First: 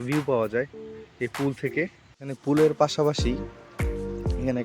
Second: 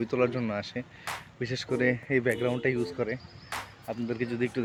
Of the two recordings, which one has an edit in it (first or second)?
first